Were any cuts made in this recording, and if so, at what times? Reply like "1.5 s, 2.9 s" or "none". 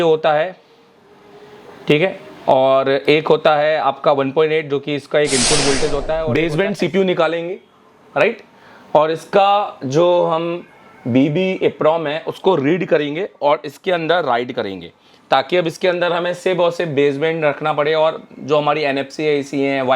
6.3 s